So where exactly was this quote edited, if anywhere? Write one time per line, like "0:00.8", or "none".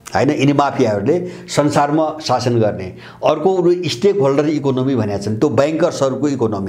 none